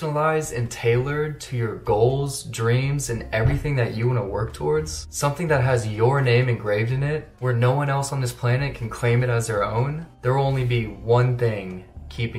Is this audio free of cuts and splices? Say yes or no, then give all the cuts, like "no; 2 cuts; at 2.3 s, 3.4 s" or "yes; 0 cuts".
yes; 0 cuts